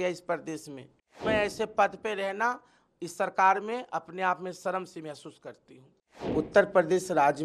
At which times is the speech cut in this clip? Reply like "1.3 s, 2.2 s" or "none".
1.2 s, 6.1 s